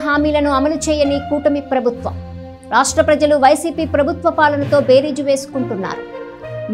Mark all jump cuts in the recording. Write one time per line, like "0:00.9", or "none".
none